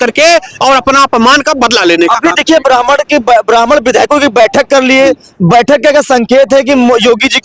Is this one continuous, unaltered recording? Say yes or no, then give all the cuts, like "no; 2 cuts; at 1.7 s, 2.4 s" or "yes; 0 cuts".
yes; 0 cuts